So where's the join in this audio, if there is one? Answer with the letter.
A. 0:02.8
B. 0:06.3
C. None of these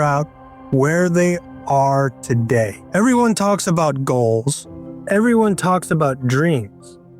A